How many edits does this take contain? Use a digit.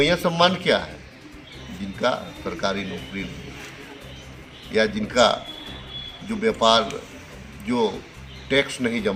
0